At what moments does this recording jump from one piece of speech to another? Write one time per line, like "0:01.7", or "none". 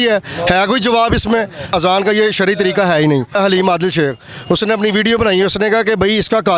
0:01.7
0:03.4